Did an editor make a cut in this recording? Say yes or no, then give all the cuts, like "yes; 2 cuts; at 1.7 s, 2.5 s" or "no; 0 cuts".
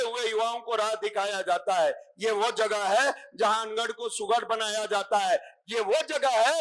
no; 0 cuts